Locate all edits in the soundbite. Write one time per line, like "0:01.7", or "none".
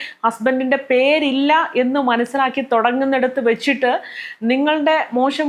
none